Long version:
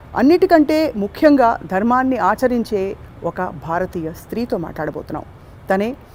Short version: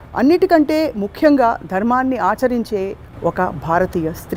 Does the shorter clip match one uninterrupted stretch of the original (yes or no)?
yes